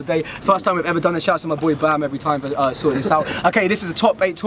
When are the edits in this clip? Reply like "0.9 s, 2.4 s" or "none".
none